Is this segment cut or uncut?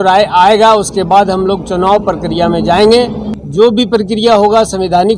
cut